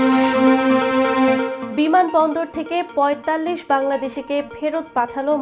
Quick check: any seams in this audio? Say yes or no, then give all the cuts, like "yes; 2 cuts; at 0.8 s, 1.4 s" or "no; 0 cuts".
yes; 1 cut; at 1.6 s